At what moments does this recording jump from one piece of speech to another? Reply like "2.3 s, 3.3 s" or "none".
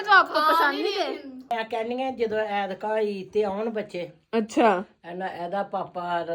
1.4 s